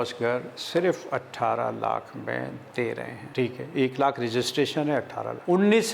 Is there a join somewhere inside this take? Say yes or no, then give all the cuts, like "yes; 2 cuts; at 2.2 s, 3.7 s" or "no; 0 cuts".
no; 0 cuts